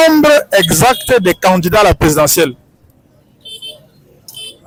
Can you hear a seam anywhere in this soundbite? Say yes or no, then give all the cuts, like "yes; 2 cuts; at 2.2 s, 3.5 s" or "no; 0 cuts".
no; 0 cuts